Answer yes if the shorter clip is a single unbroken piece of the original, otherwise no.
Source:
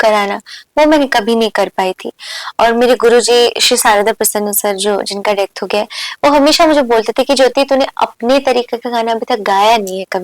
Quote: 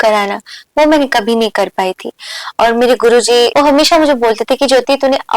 no